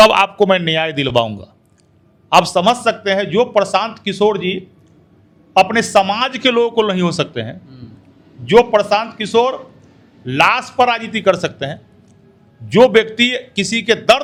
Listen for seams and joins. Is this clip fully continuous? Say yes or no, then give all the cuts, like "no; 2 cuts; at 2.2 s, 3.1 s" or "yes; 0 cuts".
yes; 0 cuts